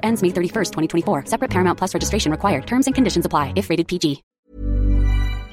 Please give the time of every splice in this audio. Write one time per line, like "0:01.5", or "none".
0:04.3